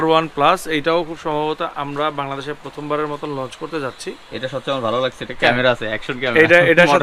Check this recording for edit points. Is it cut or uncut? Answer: uncut